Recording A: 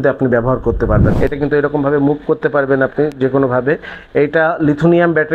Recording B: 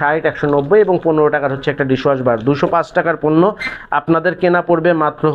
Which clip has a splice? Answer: A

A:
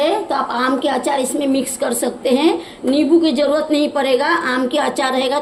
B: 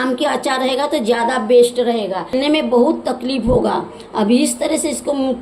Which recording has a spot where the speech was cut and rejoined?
B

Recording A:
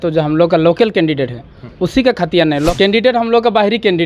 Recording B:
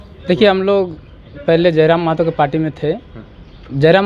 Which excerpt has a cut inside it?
A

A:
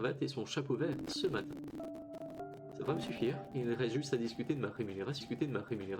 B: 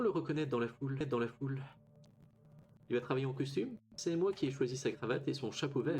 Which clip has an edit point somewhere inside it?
B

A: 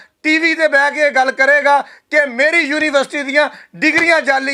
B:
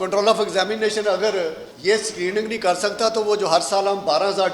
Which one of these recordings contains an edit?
B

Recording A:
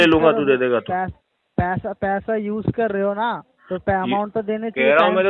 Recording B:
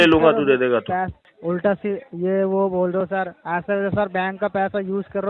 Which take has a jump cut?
B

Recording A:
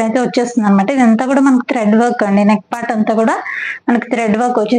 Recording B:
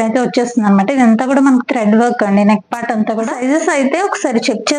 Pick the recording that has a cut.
B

